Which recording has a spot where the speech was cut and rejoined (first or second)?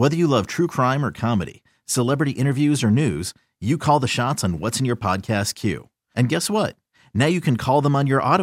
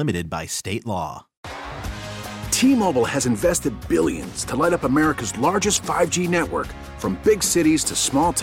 second